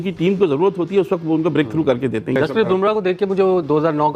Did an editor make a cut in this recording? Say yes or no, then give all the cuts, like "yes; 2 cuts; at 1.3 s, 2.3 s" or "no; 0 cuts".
yes; 1 cut; at 2.4 s